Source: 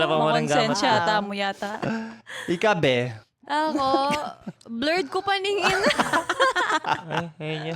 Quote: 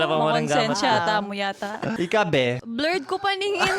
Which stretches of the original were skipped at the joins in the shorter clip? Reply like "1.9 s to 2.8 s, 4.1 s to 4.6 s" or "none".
1.9 s to 2.4 s, 3.2 s to 4.7 s